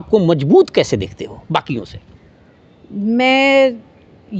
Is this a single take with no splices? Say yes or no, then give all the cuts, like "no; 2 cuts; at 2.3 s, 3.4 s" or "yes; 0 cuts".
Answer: yes; 0 cuts